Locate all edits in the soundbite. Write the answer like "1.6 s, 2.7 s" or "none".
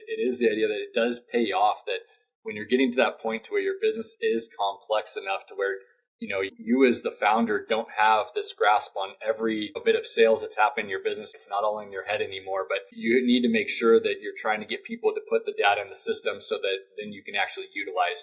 6.5 s, 9.7 s, 11.3 s, 12.9 s